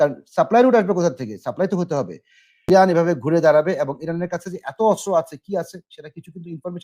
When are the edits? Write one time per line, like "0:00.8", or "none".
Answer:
0:02.7